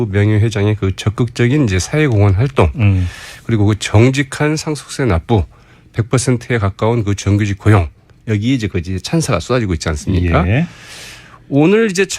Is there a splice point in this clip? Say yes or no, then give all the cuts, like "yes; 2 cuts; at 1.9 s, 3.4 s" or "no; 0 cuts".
yes; 1 cut; at 9.9 s